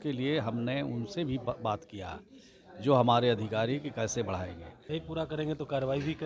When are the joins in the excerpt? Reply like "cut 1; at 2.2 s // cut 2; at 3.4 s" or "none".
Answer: cut 1; at 4.7 s